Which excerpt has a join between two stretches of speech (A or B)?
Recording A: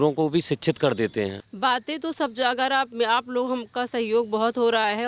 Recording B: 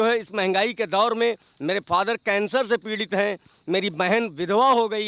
A